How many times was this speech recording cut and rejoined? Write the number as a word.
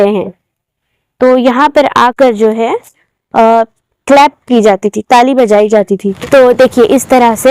one